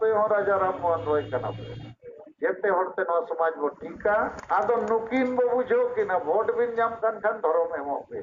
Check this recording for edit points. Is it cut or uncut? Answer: cut